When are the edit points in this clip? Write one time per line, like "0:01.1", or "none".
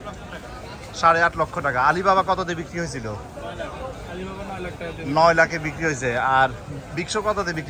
none